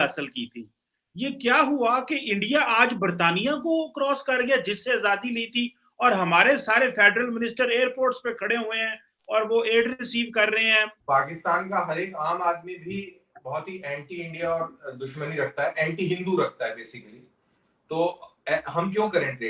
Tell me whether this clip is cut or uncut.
cut